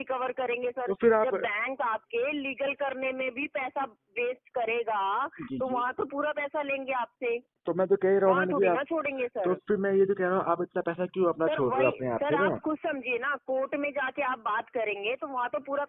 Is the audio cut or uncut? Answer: uncut